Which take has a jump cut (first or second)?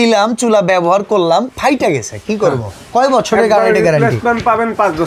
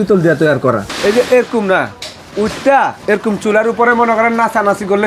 second